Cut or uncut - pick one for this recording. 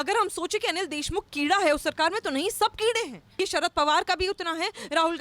cut